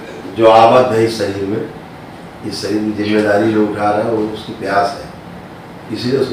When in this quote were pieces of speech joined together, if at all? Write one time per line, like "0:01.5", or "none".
none